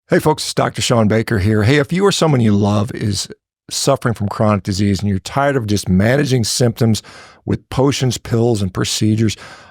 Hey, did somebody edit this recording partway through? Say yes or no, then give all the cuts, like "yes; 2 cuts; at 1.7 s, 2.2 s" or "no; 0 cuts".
no; 0 cuts